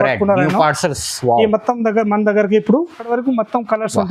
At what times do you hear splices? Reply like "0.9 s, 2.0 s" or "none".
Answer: 3.0 s

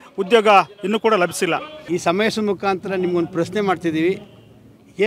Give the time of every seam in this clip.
1.7 s

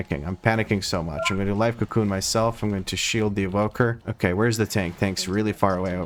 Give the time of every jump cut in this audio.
none

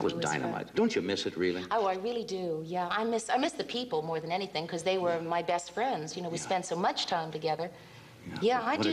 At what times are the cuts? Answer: none

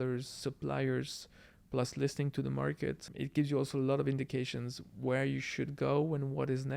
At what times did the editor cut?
3.1 s

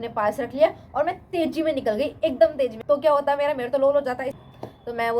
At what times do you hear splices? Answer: 2.8 s, 4.4 s

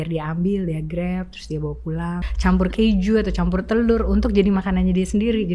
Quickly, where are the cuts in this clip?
2.2 s

